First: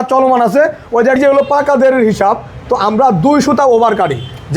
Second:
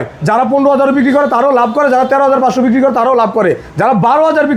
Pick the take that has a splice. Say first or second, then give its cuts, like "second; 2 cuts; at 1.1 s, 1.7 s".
first; 1 cut; at 1.2 s